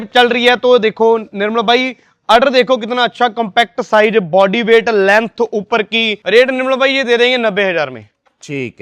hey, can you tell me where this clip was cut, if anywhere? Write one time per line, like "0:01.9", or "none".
0:06.2